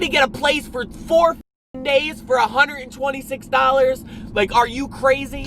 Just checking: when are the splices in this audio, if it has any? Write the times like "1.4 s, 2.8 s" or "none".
none